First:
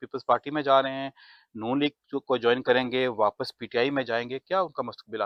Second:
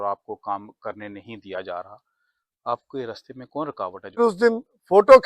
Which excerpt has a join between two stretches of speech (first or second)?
second